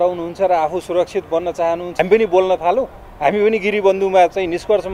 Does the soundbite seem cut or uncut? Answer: cut